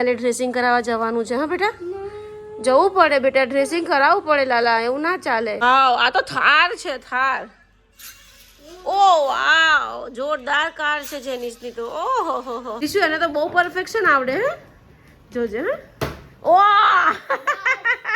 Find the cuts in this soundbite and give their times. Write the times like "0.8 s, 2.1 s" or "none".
5.6 s, 12.7 s